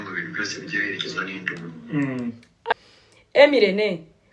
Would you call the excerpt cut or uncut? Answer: cut